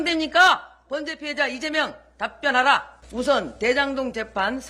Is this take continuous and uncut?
no; 1 cut; at 3.0 s

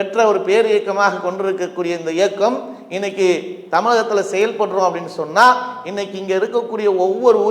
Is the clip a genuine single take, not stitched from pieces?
yes; 0 cuts

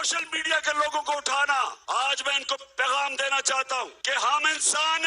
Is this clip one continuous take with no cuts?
no; 2 cuts; at 1.8 s, 4.0 s

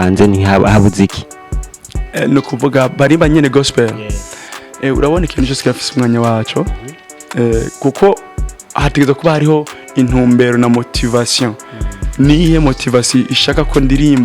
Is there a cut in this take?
no; 0 cuts

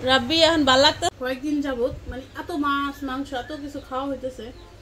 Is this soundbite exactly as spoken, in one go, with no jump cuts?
no; 1 cut; at 1.1 s

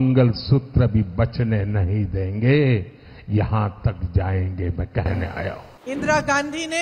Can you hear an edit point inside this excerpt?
yes; 1 cut; at 5.7 s

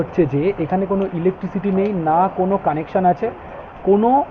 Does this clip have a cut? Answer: no; 0 cuts

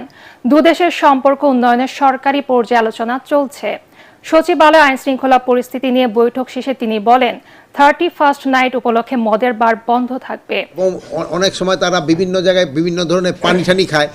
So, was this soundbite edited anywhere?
yes; 1 cut; at 10.7 s

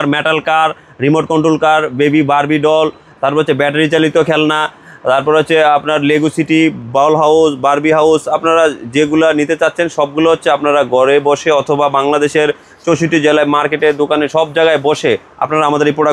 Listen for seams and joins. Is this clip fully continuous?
yes; 0 cuts

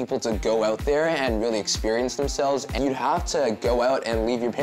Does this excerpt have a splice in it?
yes; 1 cut; at 2.7 s

